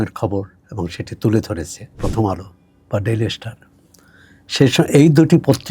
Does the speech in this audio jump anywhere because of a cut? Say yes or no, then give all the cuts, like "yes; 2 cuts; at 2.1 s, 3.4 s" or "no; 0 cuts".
yes; 1 cut; at 2.0 s